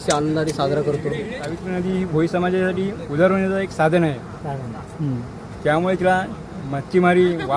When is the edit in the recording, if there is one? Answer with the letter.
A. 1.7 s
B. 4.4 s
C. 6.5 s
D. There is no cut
A